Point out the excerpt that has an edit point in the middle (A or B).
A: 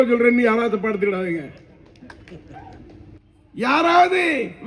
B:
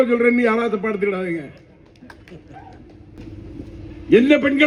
A